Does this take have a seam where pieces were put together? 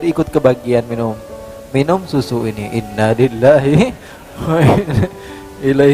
no; 0 cuts

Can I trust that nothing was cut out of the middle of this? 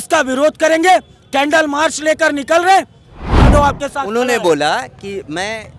no; 1 cut; at 3.5 s

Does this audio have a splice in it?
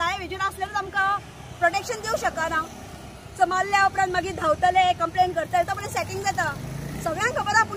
no; 0 cuts

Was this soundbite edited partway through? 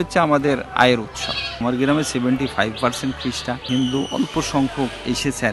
yes; 2 cuts; at 1.6 s, 3.6 s

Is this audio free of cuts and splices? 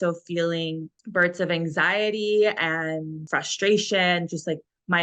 no; 1 cut; at 3.2 s

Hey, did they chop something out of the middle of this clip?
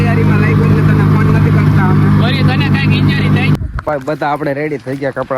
yes; 1 cut; at 3.6 s

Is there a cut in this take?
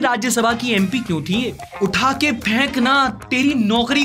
yes; 1 cut; at 1.7 s

